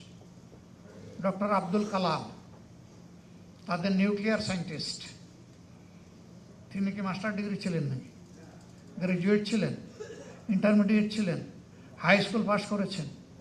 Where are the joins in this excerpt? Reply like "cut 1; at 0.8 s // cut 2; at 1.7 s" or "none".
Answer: none